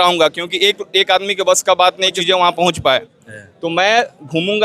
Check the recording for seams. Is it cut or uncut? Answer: cut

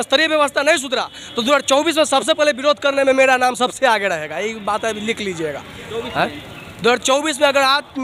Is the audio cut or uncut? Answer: uncut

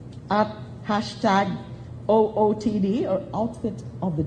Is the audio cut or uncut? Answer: uncut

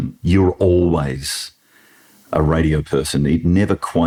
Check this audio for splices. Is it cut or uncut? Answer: uncut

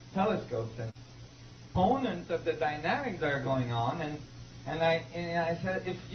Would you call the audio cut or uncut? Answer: uncut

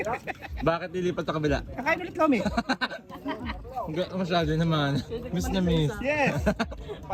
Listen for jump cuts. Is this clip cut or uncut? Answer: uncut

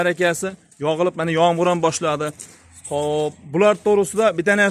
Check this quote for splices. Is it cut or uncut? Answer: uncut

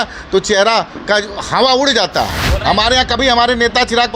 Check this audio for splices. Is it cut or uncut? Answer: cut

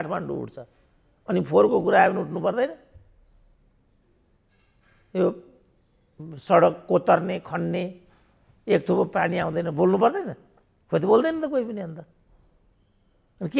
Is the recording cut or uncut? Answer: uncut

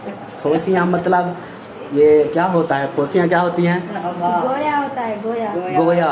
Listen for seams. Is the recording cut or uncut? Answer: uncut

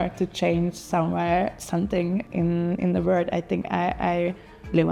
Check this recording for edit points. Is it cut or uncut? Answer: uncut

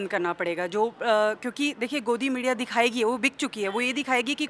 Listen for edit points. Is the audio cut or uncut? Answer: uncut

